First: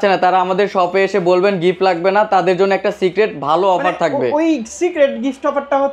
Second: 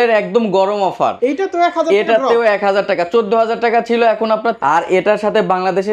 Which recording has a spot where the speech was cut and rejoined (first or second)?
second